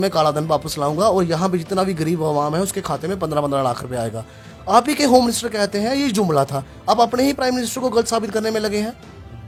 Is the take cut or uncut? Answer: uncut